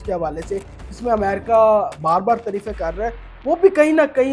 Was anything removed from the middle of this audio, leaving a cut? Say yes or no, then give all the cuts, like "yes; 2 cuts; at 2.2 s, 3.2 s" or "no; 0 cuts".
no; 0 cuts